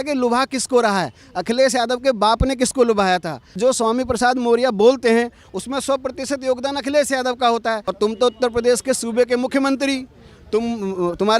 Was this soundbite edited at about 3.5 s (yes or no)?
yes